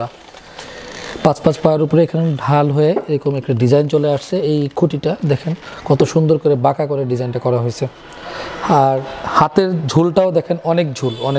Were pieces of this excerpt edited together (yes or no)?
no